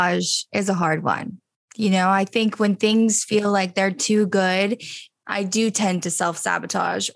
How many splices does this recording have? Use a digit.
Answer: 1